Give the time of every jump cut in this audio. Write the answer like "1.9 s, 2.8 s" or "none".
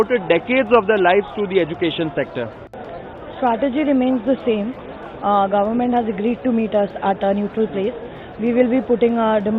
2.6 s